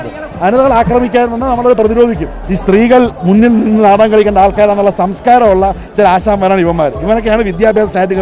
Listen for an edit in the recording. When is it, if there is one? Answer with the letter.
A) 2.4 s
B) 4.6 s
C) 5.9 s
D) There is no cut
A